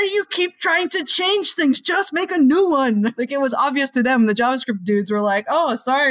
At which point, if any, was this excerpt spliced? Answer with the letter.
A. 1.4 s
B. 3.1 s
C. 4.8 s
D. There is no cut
B